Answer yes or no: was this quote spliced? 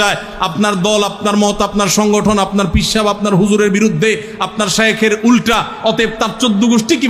no